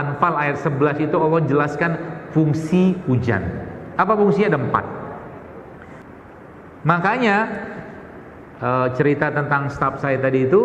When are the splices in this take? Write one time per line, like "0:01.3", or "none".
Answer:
0:06.0